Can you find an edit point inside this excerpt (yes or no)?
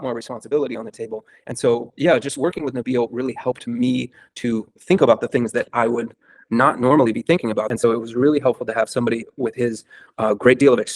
yes